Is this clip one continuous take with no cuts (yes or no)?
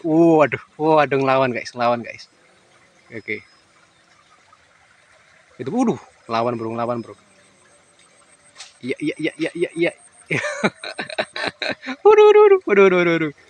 yes